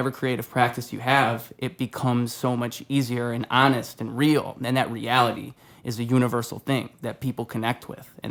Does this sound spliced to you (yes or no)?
no